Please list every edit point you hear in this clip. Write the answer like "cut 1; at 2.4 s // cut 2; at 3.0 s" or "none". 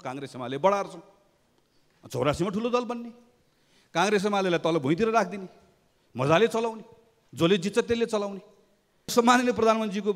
cut 1; at 9.1 s